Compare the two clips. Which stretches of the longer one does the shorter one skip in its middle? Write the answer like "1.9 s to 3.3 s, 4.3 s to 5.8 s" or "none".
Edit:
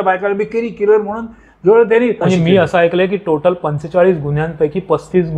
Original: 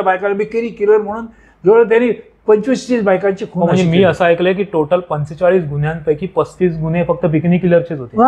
2.2 s to 3.7 s